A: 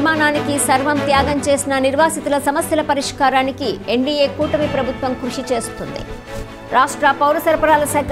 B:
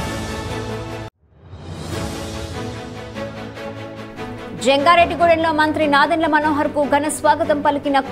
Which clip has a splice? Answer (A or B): B